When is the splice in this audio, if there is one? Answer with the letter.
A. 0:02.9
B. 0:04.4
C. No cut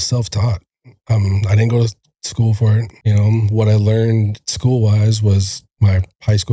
A